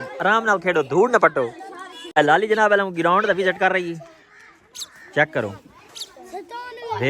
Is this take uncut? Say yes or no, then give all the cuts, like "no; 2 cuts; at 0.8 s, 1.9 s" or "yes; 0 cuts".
no; 1 cut; at 2.2 s